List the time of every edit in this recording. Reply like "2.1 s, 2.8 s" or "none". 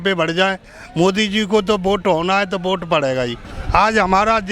3.5 s